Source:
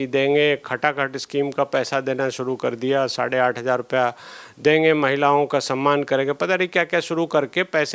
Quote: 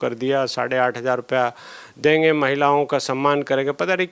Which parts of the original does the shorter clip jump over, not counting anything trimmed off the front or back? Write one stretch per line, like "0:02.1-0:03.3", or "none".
none